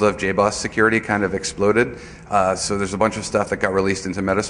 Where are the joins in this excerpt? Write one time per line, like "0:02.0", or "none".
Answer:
0:01.7

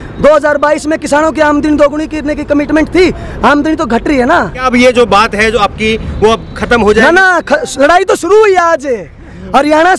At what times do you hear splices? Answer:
0:04.7

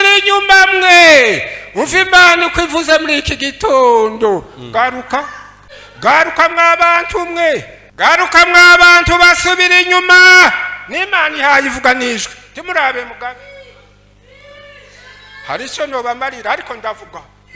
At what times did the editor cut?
0:05.6
0:07.8

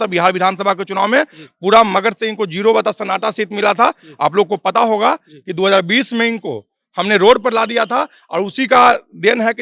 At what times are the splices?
none

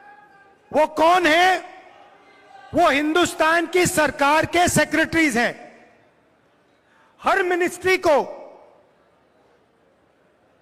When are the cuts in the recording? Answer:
none

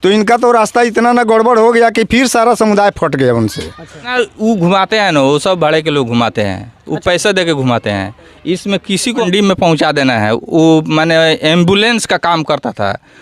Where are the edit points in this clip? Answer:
0:04.1
0:09.2

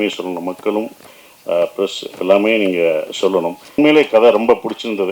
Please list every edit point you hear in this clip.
0:03.8

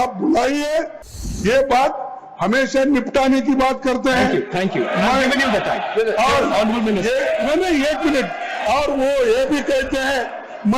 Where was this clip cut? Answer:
0:01.1

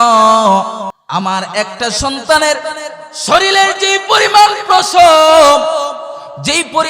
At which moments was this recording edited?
0:01.0

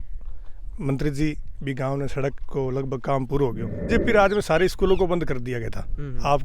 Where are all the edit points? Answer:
0:03.9

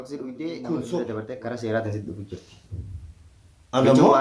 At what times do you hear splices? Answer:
0:01.1

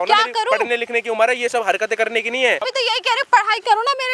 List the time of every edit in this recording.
0:02.7

